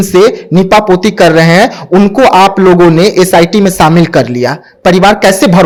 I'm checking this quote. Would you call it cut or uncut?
uncut